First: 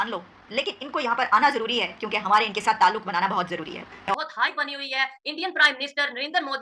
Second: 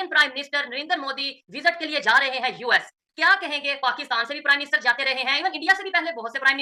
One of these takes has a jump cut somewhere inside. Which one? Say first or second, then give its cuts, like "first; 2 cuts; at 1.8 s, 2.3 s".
first; 1 cut; at 4.1 s